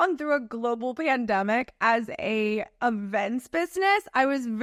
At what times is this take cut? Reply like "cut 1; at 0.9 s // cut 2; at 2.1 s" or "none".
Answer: none